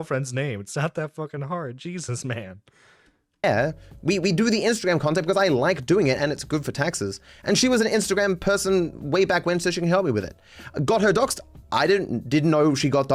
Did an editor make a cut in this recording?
no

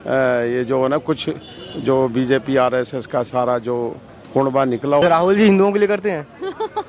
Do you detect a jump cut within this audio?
yes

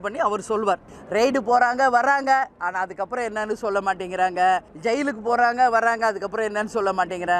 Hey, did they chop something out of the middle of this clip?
yes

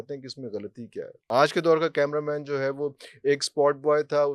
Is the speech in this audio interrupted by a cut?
yes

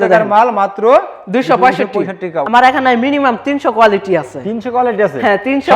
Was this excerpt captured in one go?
no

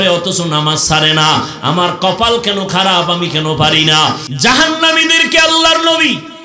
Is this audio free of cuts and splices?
no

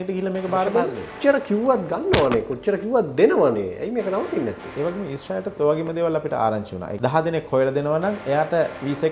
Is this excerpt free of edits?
no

